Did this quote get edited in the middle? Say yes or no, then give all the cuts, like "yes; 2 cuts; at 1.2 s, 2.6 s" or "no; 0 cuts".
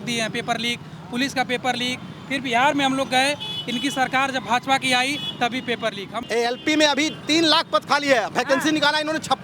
yes; 1 cut; at 6.1 s